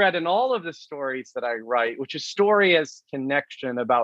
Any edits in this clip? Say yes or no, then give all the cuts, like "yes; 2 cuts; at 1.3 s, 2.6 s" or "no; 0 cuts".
no; 0 cuts